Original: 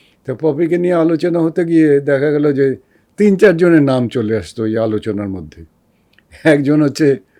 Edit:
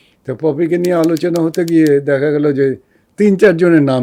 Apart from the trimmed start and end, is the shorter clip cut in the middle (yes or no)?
no